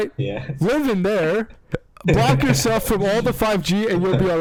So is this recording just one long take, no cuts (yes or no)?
yes